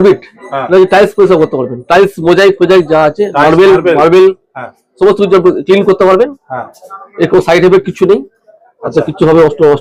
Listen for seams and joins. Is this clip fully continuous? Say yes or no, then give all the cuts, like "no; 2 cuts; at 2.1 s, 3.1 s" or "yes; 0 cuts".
yes; 0 cuts